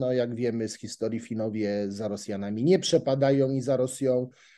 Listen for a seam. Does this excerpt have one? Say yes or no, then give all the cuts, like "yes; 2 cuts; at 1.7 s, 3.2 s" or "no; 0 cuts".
no; 0 cuts